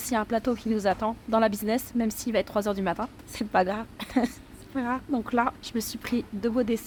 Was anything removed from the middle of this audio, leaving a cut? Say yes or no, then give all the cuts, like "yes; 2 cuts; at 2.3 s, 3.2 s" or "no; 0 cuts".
no; 0 cuts